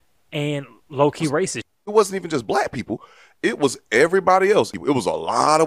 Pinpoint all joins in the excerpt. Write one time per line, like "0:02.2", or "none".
0:01.8
0:04.7